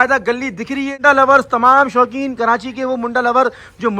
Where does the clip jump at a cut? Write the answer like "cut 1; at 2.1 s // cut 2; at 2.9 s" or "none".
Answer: cut 1; at 1.0 s